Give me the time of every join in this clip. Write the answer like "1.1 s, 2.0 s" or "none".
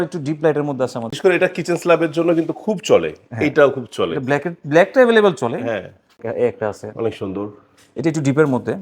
1.1 s, 6.2 s